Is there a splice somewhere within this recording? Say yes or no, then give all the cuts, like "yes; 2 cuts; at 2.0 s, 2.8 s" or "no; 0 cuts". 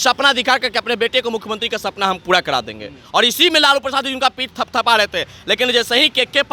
no; 0 cuts